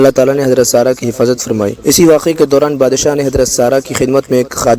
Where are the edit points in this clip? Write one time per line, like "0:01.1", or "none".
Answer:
0:01.8